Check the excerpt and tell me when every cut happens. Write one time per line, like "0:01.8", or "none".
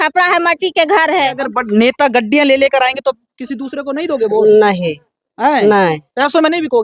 0:01.4